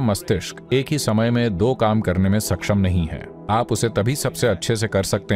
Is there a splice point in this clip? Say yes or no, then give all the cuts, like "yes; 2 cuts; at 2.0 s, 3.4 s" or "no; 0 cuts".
no; 0 cuts